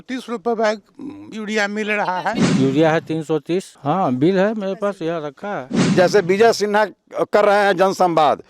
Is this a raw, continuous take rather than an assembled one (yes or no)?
no